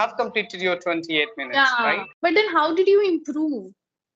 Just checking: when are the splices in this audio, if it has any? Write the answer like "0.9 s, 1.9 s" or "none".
2.1 s